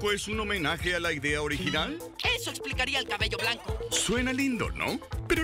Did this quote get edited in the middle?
no; 0 cuts

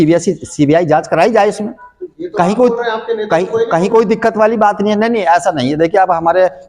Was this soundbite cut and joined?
no; 0 cuts

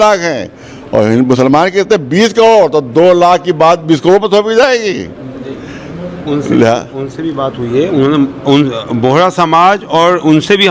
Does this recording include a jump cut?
no; 0 cuts

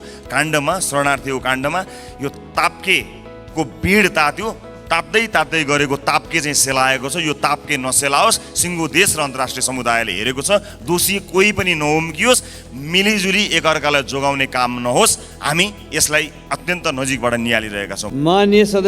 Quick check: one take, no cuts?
yes; 0 cuts

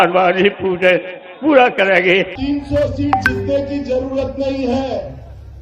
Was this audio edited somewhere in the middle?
yes; 1 cut; at 2.3 s

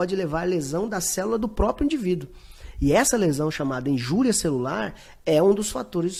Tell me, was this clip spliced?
no; 0 cuts

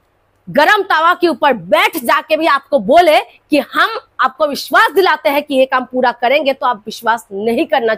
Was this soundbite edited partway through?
no; 0 cuts

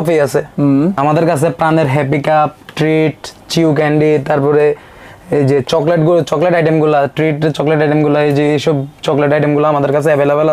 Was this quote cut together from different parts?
yes; 1 cut; at 1.0 s

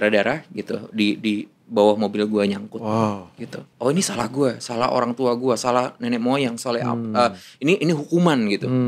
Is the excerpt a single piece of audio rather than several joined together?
no; 1 cut; at 3.7 s

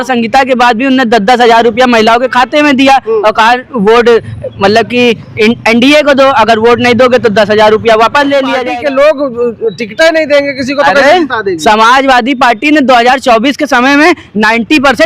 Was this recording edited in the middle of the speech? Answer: yes; 1 cut; at 8.6 s

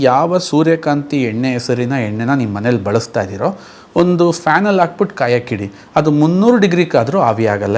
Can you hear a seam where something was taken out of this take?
no; 0 cuts

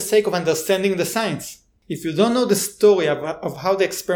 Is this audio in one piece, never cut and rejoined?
yes; 0 cuts

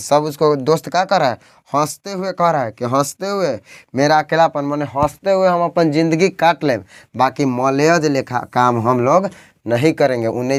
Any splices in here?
no; 0 cuts

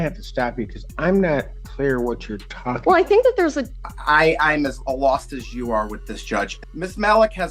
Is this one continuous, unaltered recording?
no; 2 cuts; at 3.7 s, 6.6 s

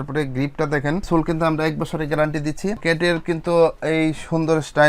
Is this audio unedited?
no; 2 cuts; at 1.0 s, 2.8 s

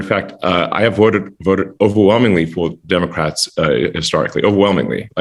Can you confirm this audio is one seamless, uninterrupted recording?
yes; 0 cuts

